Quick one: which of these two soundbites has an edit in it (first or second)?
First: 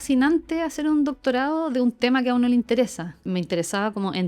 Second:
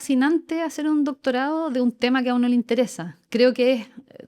first